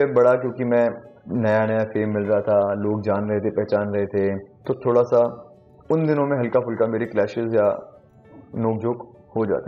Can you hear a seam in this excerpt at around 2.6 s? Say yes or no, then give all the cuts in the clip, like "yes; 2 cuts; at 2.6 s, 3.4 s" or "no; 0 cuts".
no; 2 cuts; at 1.1 s, 4.5 s